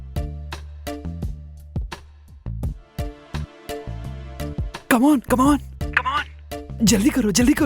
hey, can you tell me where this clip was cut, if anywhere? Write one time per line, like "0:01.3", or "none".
0:01.1

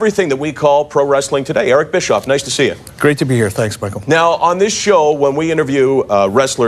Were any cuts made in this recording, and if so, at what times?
0:01.5

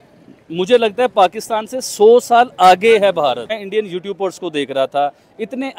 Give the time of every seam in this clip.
0:03.6

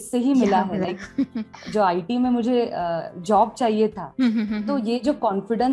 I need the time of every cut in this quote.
0:01.6

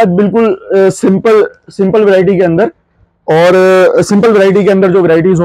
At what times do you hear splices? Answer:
none

